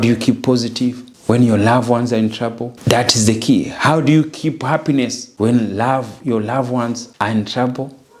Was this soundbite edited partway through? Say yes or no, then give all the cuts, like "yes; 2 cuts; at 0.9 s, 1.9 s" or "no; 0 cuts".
yes; 4 cuts; at 1.1 s, 2.7 s, 5.2 s, 7.1 s